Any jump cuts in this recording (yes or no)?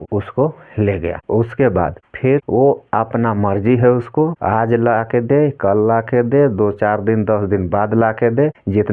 no